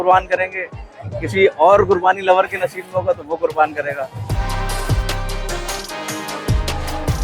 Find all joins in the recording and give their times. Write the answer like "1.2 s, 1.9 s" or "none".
4.3 s